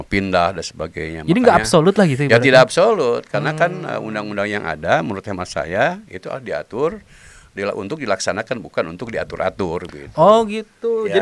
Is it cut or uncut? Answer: uncut